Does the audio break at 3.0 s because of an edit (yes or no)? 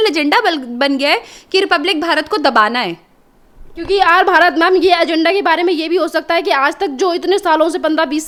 no